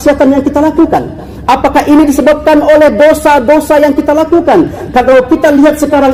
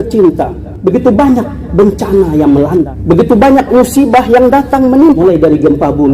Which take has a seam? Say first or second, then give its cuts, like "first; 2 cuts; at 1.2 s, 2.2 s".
second; 2 cuts; at 2.9 s, 5.2 s